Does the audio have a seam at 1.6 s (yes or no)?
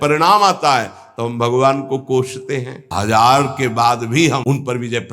no